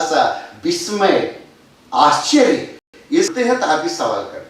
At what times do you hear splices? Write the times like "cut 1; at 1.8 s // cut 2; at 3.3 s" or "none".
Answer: cut 1; at 3.0 s